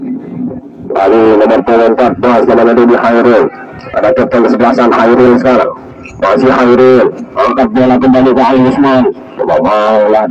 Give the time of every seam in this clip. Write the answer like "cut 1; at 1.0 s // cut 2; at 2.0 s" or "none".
none